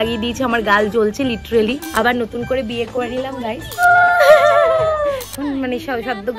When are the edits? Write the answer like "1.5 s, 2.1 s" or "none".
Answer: 1.8 s, 3.8 s, 5.3 s